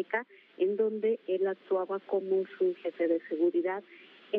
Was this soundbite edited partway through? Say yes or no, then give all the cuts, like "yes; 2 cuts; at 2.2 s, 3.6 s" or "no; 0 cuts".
no; 0 cuts